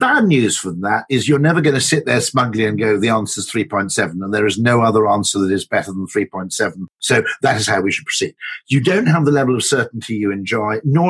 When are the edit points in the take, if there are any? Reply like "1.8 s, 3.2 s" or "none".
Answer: none

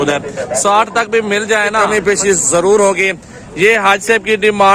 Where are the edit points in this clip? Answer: 1.8 s

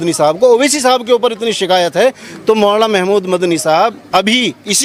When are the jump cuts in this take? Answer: none

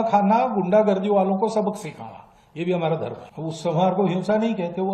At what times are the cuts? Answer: 3.3 s

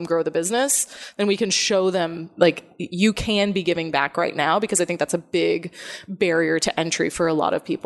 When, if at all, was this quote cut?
none

